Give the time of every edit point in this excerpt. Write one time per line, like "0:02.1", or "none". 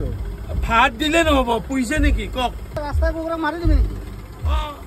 0:02.8